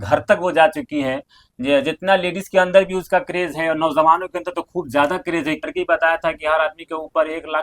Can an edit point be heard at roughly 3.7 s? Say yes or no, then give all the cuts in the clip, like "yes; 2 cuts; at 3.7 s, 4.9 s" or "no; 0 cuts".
no; 1 cut; at 5.7 s